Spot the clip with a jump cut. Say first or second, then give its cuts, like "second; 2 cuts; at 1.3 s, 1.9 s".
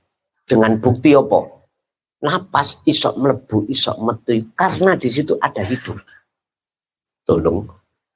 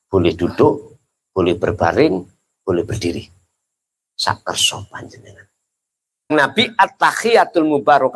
second; 1 cut; at 6.3 s